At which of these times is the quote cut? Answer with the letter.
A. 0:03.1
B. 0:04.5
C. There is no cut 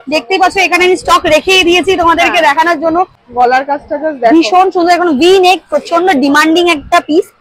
A